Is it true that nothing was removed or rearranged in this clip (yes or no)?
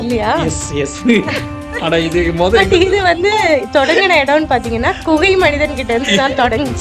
yes